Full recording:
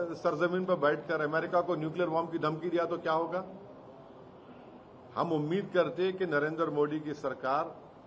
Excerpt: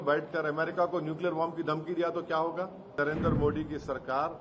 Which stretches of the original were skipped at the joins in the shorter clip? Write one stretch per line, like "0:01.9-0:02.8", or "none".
0:03.7-0:06.3